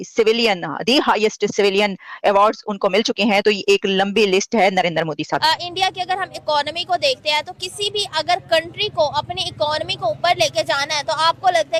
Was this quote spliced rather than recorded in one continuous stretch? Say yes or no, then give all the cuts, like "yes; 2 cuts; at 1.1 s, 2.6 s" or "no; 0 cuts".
no; 0 cuts